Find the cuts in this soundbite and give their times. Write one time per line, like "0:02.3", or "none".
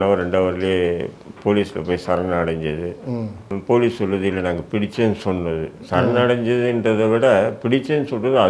0:03.4